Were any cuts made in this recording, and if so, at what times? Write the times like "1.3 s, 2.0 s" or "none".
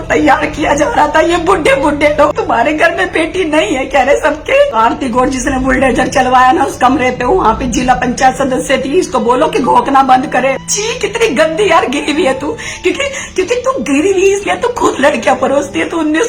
2.3 s, 4.8 s, 10.7 s